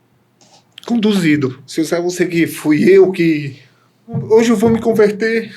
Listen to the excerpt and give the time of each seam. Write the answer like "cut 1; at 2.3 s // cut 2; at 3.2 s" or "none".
cut 1; at 1.6 s // cut 2; at 4.2 s